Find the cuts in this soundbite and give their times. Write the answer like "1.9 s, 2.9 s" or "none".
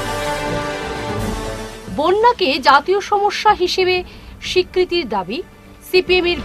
1.3 s